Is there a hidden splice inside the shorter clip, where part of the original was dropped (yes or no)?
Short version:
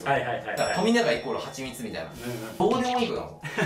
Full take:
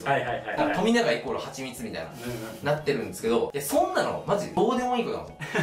yes